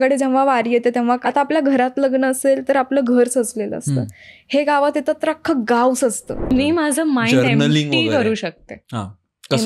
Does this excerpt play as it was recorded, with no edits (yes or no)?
no